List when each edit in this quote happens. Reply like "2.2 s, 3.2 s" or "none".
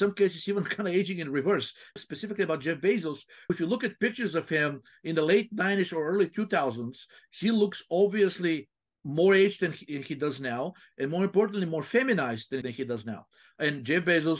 2.0 s, 3.5 s, 12.6 s